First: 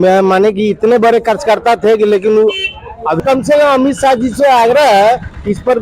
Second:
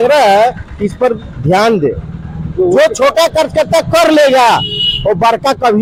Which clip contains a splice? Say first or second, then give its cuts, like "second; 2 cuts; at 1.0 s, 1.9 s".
first; 1 cut; at 3.2 s